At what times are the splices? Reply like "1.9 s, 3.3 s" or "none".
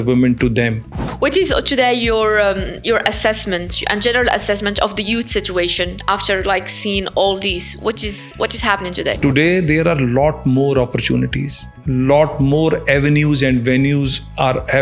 1.0 s, 9.2 s